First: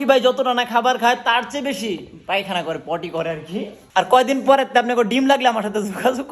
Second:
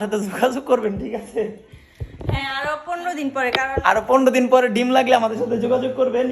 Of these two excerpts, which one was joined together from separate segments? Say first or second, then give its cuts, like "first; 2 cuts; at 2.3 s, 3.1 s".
first; 1 cut; at 3.8 s